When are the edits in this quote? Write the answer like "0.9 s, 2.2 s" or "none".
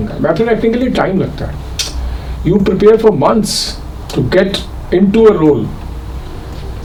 none